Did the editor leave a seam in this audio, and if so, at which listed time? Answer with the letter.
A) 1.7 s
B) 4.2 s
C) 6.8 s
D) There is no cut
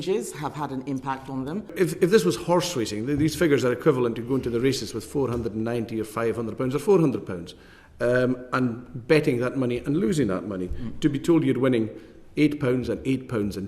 A